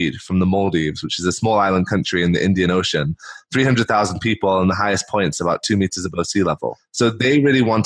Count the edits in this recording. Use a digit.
0